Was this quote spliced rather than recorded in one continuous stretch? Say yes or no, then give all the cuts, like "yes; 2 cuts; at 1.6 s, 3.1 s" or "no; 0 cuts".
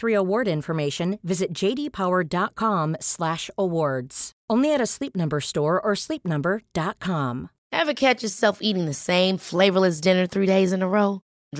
no; 0 cuts